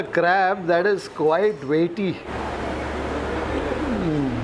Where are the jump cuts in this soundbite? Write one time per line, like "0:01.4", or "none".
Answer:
0:02.3
0:03.5